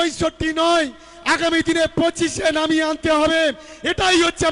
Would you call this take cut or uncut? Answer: uncut